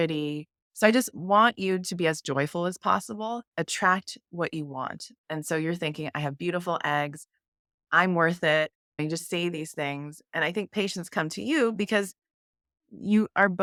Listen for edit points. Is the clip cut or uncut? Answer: uncut